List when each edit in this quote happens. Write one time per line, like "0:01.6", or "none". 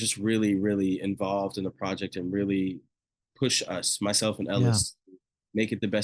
none